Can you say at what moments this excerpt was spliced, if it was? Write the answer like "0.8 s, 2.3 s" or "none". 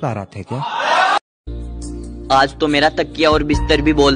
1.4 s